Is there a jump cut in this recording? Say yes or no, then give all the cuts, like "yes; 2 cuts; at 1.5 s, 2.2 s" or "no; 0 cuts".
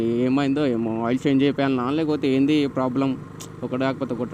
no; 0 cuts